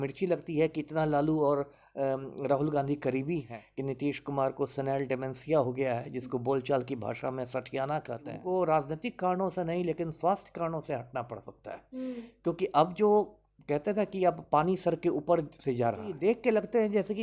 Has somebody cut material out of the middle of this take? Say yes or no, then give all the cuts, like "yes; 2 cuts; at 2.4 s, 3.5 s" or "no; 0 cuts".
yes; 3 cuts; at 3.6 s, 8.4 s, 16.1 s